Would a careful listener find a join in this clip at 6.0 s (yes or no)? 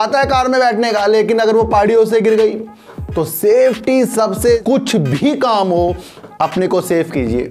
no